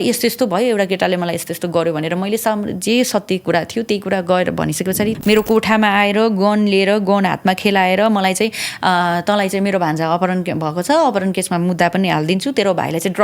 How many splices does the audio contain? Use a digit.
1